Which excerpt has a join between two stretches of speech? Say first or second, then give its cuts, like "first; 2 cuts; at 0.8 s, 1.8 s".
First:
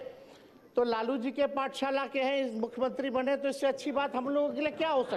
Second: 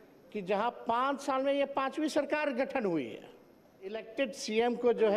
second; 1 cut; at 4.0 s